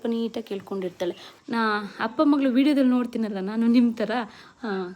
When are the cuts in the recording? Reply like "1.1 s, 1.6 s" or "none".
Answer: 1.3 s